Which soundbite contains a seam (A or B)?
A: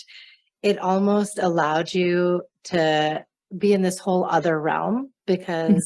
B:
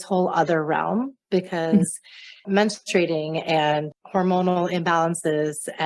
B